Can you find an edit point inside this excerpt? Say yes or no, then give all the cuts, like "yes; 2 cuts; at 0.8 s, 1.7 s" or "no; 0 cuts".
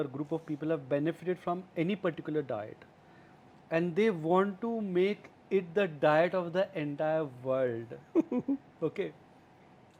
no; 0 cuts